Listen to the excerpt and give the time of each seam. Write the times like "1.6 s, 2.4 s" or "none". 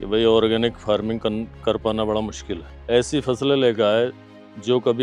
2.6 s